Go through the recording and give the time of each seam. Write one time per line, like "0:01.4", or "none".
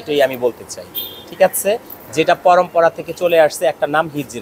none